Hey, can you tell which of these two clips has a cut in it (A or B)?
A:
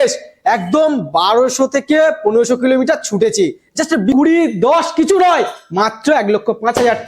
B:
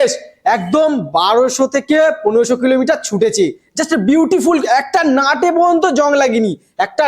A